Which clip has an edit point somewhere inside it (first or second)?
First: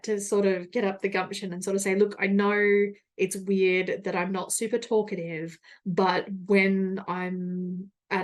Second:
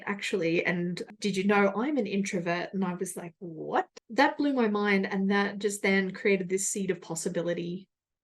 second